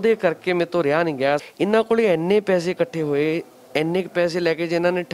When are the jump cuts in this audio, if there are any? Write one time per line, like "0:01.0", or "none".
0:01.5